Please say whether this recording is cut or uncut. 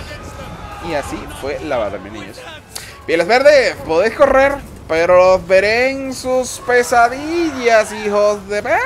uncut